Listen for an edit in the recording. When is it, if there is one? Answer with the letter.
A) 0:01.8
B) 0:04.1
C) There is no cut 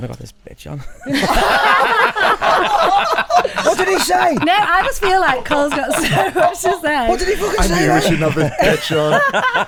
C